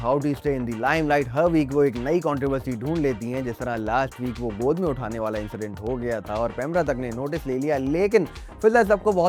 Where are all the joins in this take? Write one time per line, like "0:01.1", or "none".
none